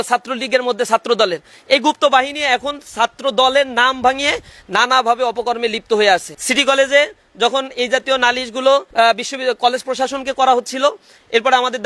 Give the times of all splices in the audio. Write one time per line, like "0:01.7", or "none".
0:06.4
0:08.9